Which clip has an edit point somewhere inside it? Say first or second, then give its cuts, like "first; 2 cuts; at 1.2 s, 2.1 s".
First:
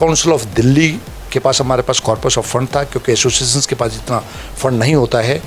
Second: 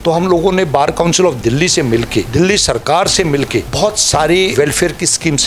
second; 3 cuts; at 2.3 s, 3.7 s, 4.5 s